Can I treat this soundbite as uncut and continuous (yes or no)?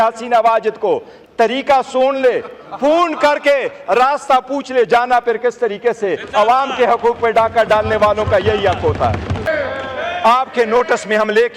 no